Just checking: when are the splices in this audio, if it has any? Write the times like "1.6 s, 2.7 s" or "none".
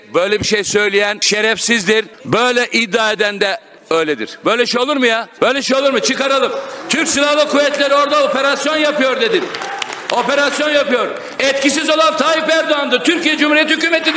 1.2 s, 2.2 s, 3.7 s, 5.3 s

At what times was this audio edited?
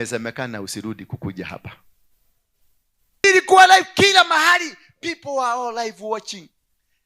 3.2 s

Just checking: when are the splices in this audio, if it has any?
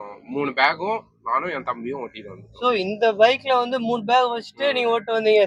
none

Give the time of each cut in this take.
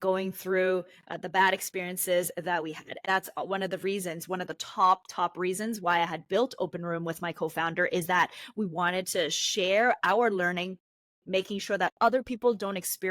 3.0 s

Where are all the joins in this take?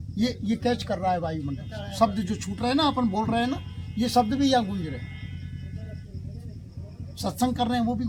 none

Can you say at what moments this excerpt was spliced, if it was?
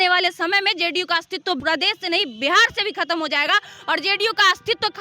1.6 s

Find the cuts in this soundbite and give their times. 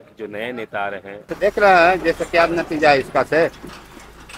1.3 s

